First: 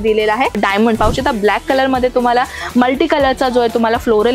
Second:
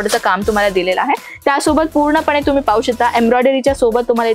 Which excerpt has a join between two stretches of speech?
first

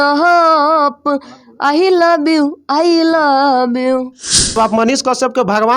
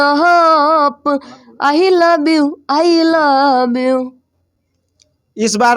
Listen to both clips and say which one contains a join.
first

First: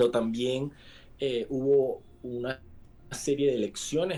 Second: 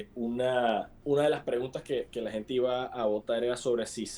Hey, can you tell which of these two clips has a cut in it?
second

